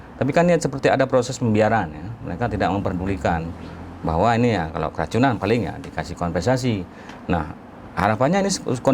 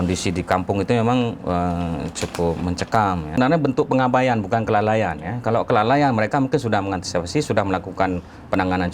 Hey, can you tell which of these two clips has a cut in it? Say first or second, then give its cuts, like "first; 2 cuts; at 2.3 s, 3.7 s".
second; 1 cut; at 3.4 s